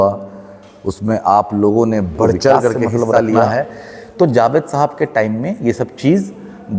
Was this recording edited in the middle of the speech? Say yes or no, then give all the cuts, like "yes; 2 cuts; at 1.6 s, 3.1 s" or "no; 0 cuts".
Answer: yes; 1 cut; at 3.5 s